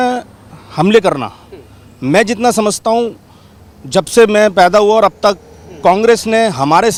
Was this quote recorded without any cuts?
yes; 0 cuts

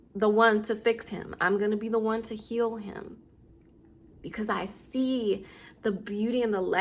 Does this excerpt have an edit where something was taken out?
no; 0 cuts

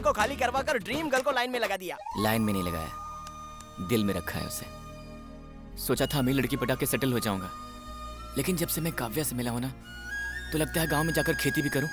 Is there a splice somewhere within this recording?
no; 0 cuts

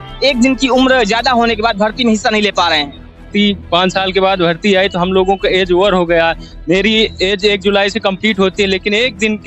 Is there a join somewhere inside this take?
yes; 1 cut; at 3.3 s

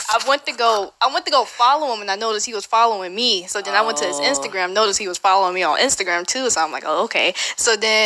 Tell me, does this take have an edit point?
no; 0 cuts

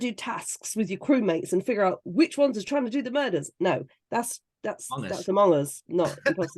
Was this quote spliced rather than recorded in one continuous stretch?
no; 0 cuts

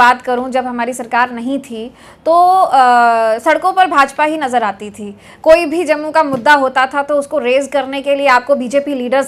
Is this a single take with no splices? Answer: yes; 0 cuts

